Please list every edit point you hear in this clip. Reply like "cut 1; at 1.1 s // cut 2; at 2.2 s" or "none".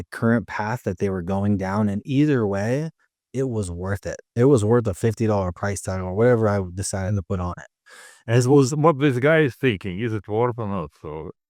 none